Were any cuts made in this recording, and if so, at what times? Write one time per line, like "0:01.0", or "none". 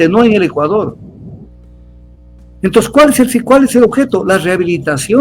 none